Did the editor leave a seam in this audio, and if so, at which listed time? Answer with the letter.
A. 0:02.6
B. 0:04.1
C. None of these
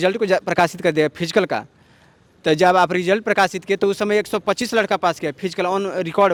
C